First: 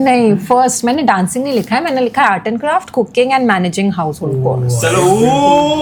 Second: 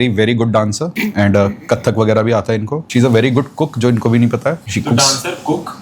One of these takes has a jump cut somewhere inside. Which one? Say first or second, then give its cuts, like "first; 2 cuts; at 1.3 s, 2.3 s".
second; 3 cuts; at 0.9 s, 2.8 s, 4.6 s